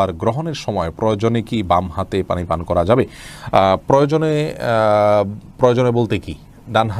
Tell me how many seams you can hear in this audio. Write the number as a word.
zero